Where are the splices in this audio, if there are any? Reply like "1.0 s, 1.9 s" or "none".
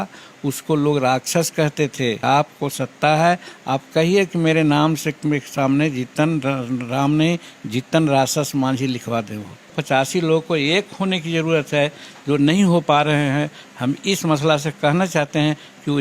2.2 s, 9.8 s